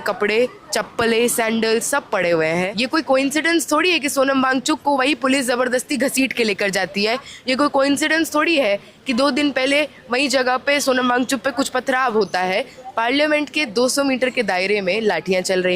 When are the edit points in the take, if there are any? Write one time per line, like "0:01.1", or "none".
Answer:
0:02.7
0:12.8